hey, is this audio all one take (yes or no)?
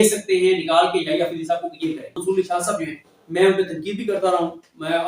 no